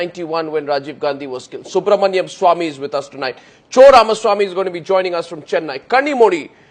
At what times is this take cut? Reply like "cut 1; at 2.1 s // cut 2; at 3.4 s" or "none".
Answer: cut 1; at 5.4 s